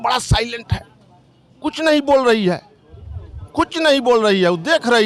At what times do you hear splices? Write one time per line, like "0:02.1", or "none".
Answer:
none

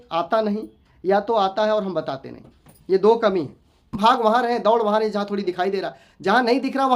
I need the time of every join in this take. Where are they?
0:03.9

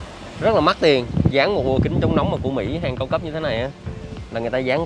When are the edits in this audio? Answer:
0:01.3

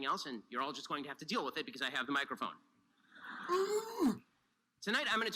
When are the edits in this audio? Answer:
0:01.1

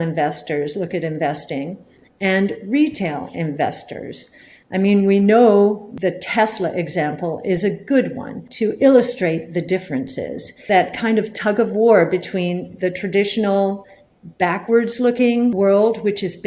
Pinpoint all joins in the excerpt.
0:05.9
0:08.4
0:10.6
0:15.5

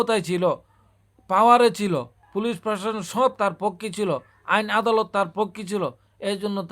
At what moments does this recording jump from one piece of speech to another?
0:02.2

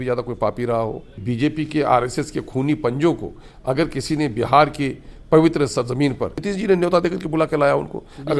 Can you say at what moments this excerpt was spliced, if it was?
0:01.2
0:06.4

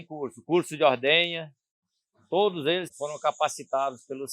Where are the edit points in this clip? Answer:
0:02.9

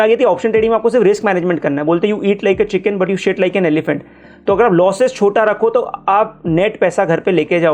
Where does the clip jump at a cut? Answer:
none

